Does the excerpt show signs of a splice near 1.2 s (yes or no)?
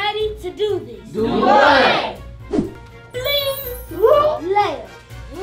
no